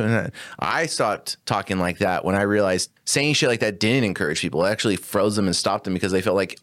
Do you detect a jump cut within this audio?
yes; 1 cut; at 3.0 s

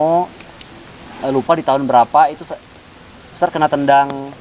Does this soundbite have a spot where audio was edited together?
no; 0 cuts

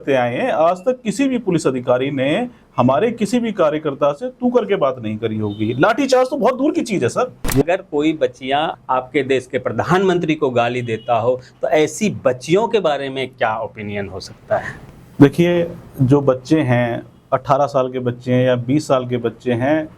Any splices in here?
yes; 2 cuts; at 7.5 s, 8.7 s

